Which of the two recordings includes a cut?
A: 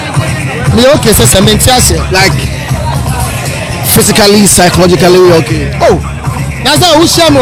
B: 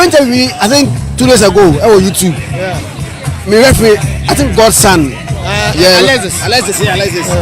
B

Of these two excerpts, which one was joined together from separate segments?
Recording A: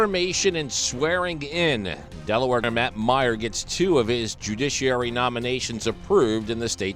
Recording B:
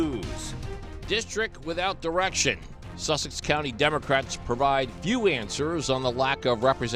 A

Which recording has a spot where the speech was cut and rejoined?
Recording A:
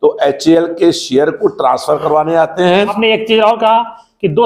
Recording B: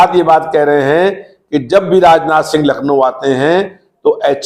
A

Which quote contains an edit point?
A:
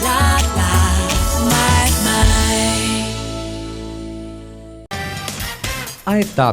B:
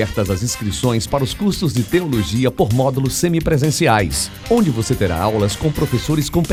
A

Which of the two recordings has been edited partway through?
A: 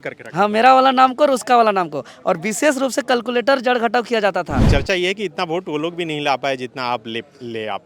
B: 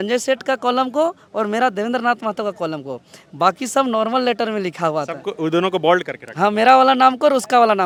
A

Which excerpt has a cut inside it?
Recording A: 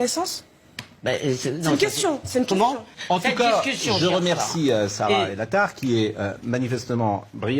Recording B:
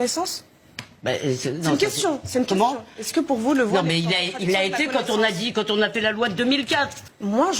A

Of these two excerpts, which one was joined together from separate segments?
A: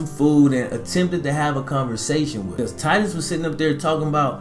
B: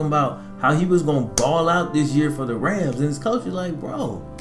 A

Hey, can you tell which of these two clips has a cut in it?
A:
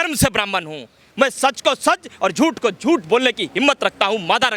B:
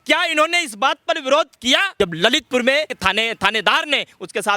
B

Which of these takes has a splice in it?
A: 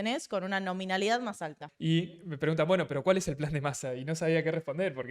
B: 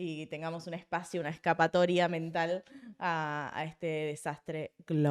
A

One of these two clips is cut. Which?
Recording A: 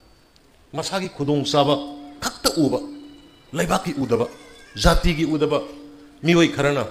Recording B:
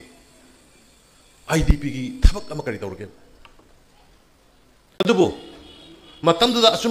B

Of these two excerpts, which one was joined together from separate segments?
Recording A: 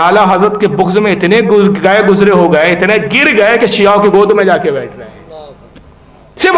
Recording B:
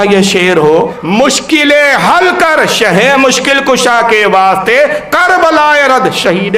B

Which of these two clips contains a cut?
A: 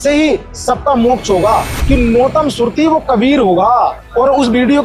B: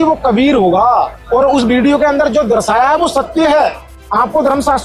A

